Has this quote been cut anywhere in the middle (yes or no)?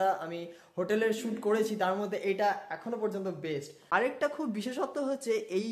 yes